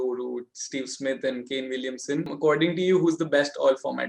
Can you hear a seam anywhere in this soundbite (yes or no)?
yes